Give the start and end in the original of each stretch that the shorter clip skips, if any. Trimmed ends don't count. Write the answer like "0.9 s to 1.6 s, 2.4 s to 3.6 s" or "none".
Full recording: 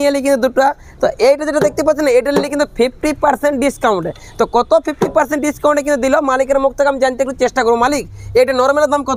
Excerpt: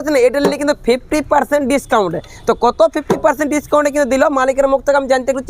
none